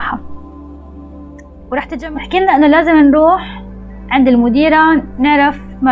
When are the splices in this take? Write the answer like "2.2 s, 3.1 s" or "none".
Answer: 2.0 s